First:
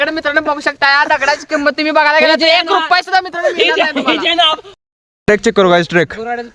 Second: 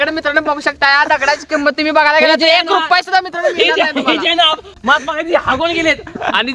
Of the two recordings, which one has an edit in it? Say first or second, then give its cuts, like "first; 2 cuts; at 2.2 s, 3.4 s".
first; 1 cut; at 4.7 s